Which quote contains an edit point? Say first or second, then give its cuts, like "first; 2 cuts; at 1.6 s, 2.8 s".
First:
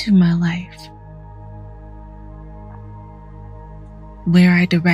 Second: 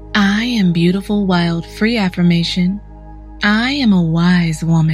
first; 2 cuts; at 1.2 s, 4.1 s